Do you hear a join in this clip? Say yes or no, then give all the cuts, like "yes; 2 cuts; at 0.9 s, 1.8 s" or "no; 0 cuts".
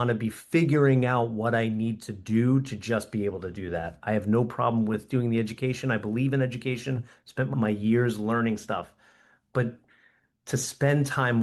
yes; 1 cut; at 7.5 s